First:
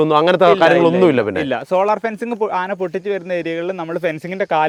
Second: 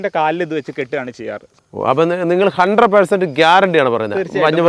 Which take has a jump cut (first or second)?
second